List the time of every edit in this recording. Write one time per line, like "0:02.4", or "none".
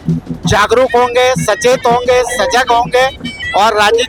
none